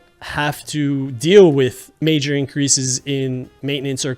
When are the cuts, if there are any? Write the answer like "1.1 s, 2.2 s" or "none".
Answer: 1.9 s